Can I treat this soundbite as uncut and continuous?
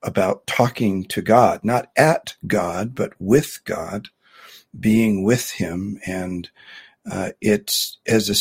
yes; 0 cuts

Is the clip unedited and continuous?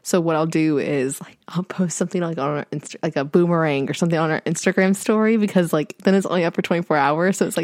yes; 0 cuts

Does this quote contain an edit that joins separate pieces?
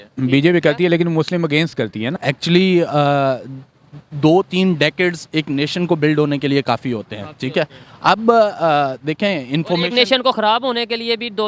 yes; 1 cut; at 2.2 s

